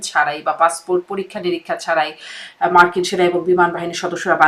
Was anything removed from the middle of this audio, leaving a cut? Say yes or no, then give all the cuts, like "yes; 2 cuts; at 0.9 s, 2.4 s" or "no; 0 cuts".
no; 0 cuts